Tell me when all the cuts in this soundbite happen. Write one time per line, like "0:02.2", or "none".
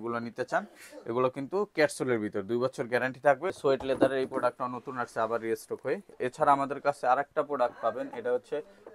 0:03.5
0:06.1